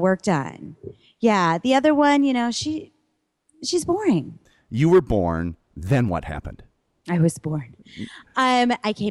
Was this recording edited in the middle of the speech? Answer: yes; 1 cut; at 4.4 s

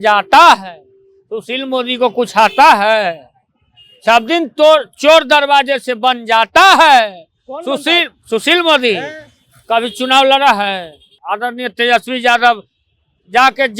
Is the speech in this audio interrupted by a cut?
yes; 1 cut; at 11.1 s

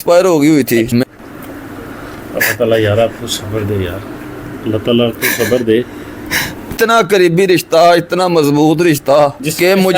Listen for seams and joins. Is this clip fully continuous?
no; 2 cuts; at 1.1 s, 6.7 s

